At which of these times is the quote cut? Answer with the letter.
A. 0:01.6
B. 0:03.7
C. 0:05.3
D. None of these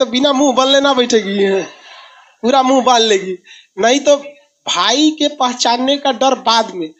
D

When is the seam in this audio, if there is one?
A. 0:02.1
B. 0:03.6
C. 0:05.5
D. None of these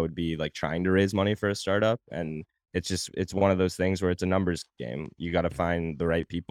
A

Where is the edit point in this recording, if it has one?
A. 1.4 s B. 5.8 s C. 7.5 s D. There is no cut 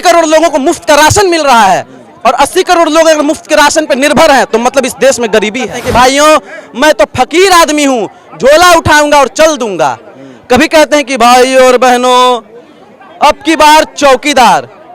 B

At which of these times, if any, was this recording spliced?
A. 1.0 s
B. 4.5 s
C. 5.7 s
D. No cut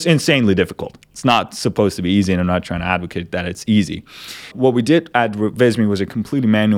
B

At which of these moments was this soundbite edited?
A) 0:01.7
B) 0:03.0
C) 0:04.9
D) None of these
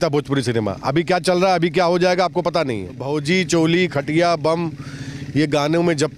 B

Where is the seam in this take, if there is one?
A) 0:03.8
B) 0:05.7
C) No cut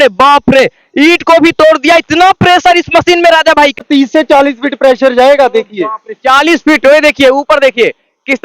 A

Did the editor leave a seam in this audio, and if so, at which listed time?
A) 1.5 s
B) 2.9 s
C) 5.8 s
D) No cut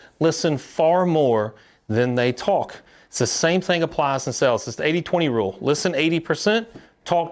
D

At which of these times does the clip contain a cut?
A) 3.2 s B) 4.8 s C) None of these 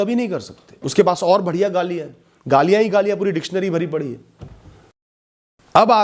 C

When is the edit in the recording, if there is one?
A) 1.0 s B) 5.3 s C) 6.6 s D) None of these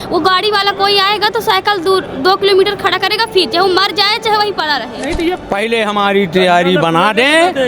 B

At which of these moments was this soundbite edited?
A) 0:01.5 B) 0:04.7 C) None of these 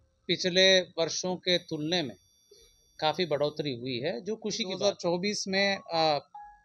B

